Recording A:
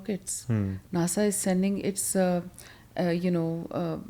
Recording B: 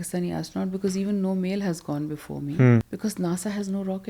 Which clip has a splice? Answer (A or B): B